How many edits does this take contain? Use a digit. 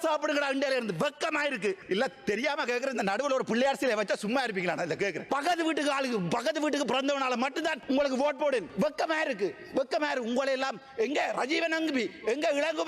2